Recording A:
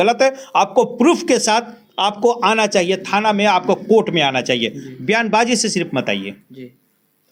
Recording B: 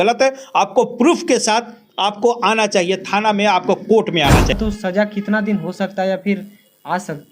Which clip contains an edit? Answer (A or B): B